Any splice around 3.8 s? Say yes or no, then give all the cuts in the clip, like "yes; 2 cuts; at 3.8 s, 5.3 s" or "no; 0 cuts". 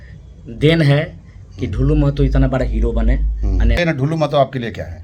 yes; 1 cut; at 3.8 s